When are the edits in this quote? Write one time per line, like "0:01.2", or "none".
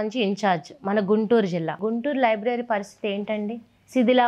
0:01.8